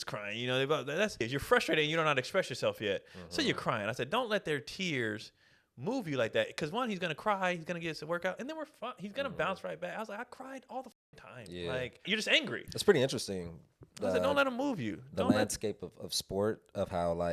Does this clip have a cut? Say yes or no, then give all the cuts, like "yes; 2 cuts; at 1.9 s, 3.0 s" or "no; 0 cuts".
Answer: yes; 2 cuts; at 1.3 s, 12.5 s